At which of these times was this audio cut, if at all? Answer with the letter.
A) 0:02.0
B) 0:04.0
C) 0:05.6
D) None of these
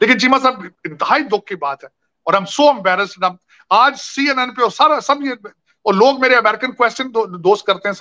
D